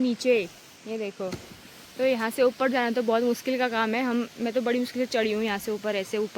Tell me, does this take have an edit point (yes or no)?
no